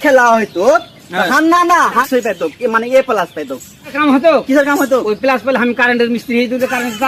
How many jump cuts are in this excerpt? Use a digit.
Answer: 1